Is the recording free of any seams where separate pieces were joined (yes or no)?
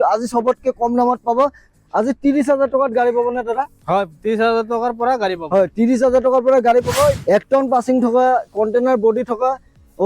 no